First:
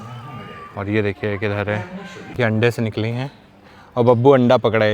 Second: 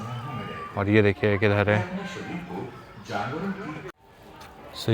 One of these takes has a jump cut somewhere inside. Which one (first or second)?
first